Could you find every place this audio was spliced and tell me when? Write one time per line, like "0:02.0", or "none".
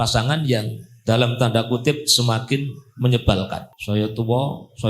0:03.7